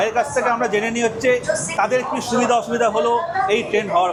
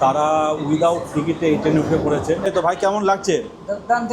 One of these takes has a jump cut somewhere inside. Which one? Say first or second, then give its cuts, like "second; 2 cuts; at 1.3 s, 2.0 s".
second; 1 cut; at 2.5 s